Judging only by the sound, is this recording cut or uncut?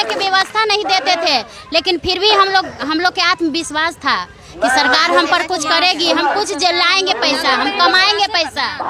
uncut